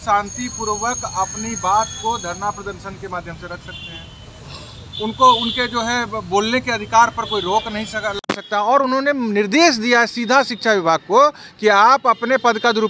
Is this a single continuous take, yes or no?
yes